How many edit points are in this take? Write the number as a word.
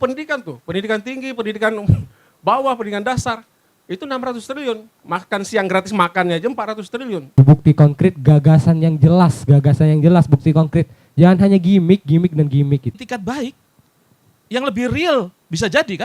two